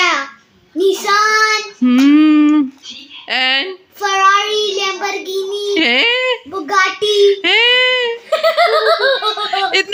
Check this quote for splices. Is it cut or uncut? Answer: uncut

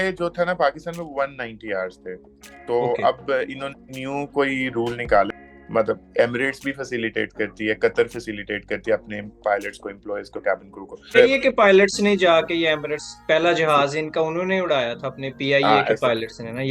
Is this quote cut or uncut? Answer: cut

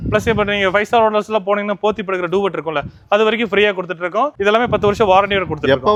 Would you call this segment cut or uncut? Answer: uncut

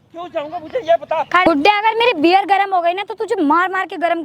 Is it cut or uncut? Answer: cut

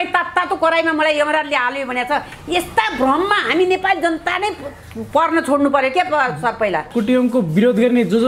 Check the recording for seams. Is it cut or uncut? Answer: cut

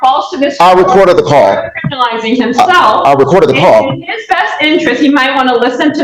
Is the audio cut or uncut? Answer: uncut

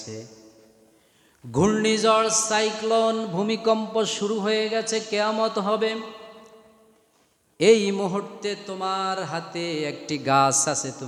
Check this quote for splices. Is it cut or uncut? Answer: uncut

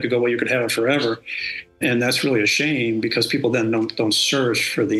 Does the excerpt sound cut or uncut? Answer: cut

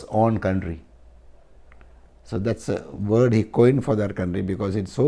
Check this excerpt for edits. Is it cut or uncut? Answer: uncut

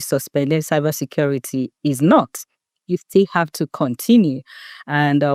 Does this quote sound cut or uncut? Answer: uncut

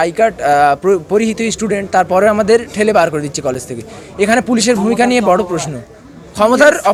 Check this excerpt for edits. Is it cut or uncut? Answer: uncut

